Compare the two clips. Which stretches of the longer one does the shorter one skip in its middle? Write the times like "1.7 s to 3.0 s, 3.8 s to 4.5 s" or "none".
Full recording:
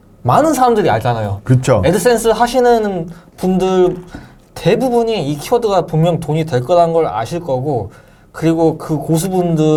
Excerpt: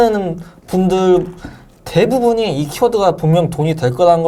none